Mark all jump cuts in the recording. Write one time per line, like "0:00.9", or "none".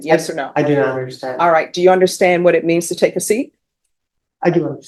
none